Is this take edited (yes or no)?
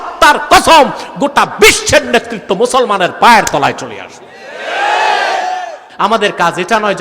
yes